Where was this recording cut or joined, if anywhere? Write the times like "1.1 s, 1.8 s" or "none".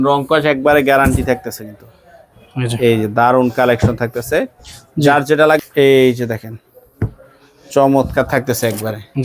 5.6 s

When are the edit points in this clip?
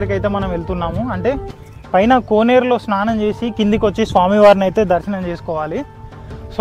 none

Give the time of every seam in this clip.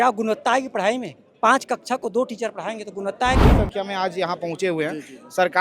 3.4 s

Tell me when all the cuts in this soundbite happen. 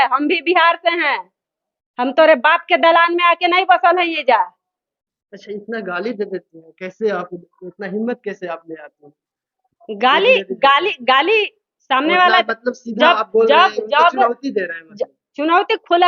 none

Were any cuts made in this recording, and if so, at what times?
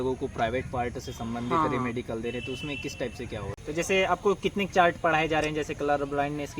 3.5 s

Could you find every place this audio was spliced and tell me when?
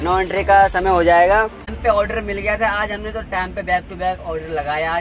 1.7 s

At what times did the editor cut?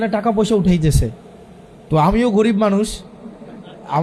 none

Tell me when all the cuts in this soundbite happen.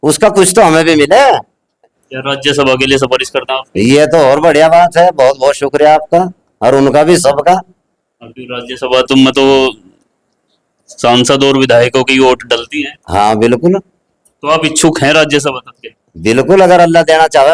2.1 s

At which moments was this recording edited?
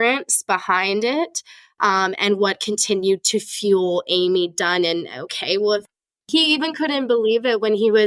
6.2 s

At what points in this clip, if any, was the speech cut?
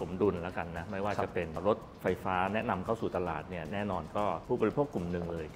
4.4 s

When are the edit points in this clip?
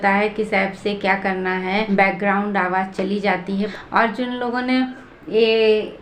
1.9 s, 3.7 s

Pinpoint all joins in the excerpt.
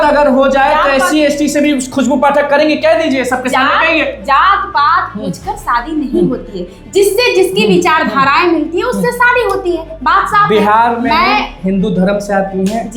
none

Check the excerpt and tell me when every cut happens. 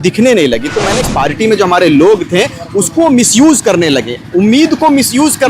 1.0 s

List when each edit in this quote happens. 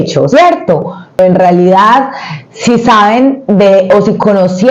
1.2 s

